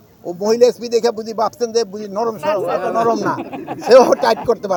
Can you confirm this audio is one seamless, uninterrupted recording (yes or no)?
yes